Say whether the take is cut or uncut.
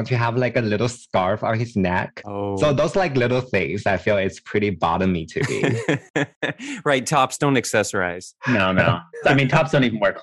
cut